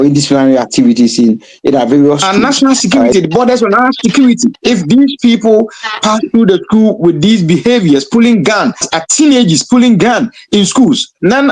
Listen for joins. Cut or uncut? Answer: cut